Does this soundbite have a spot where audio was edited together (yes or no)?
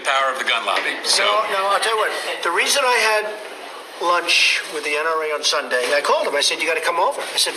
no